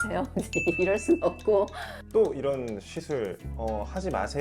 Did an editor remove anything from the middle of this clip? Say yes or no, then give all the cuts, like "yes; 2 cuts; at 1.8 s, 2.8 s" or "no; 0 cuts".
yes; 1 cut; at 1.9 s